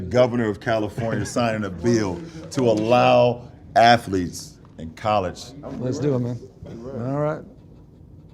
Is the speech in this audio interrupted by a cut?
yes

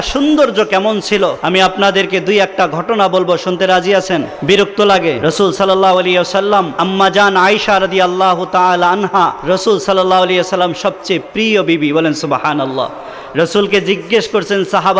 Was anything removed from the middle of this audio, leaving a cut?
yes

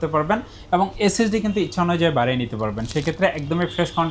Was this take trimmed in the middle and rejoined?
no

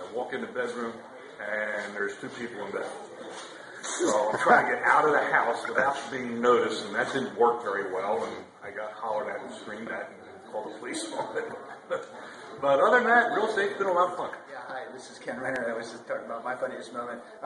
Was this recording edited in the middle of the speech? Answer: yes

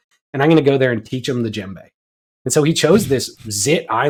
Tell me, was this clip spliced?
no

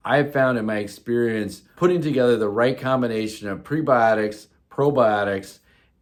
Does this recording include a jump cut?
no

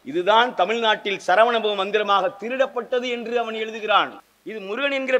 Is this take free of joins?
no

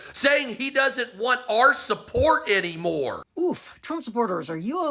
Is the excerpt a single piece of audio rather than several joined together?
no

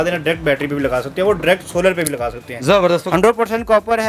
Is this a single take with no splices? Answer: no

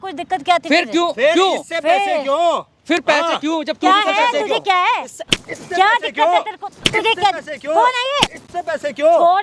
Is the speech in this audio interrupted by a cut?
no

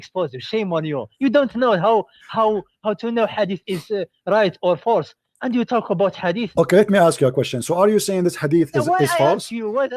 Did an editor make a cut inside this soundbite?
no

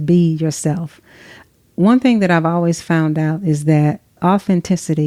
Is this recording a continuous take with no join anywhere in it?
no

